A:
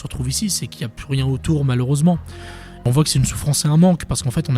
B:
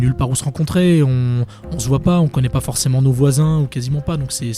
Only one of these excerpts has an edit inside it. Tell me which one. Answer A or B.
A